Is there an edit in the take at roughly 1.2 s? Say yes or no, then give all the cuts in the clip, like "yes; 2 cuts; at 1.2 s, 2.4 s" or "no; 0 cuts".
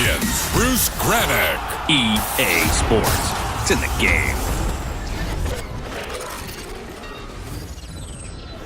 yes; 1 cut; at 1.2 s